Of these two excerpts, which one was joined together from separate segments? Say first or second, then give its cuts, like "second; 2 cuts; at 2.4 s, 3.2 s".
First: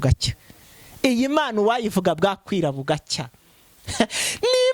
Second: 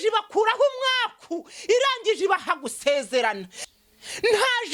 second; 1 cut; at 3.6 s